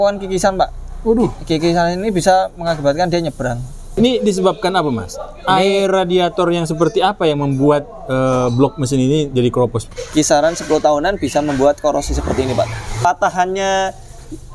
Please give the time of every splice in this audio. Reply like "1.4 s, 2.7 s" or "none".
3.9 s, 9.9 s, 13.0 s